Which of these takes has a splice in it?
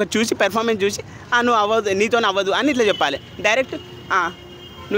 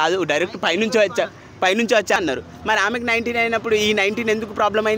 second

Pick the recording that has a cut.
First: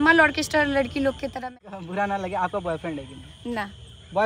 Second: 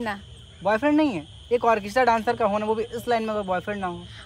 first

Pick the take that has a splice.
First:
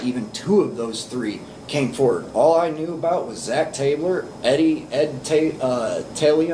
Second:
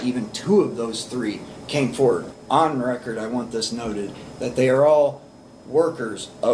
second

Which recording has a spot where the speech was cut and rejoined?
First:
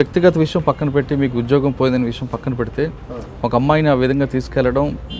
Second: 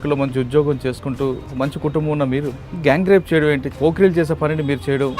second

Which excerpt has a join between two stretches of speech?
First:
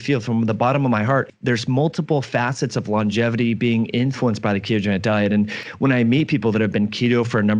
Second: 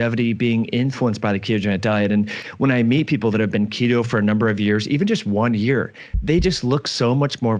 first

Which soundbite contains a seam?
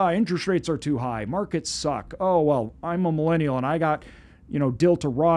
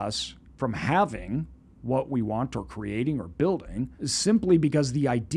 second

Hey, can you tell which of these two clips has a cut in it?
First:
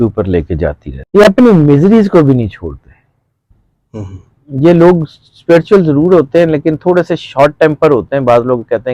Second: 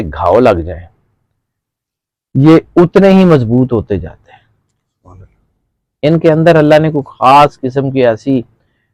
first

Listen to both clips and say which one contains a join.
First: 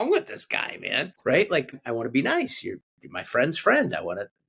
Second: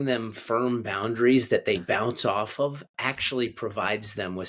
first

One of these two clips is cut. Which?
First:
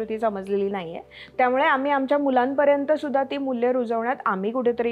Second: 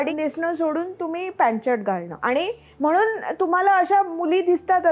second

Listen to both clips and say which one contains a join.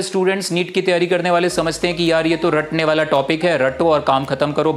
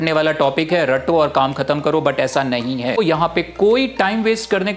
second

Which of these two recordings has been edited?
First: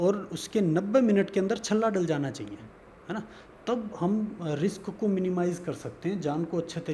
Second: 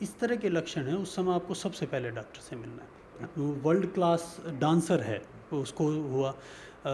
second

